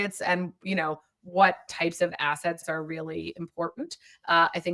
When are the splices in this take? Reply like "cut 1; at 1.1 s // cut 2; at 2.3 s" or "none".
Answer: cut 1; at 1.7 s